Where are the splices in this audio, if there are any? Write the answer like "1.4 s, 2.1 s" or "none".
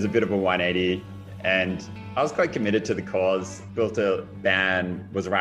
none

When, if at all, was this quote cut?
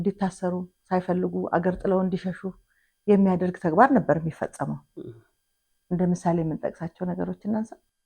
none

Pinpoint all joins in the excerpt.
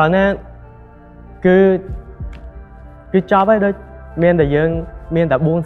none

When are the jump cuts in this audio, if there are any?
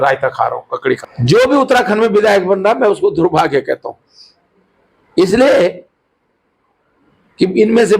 1.0 s

